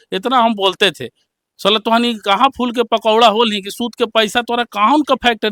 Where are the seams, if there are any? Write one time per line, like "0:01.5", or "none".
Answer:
none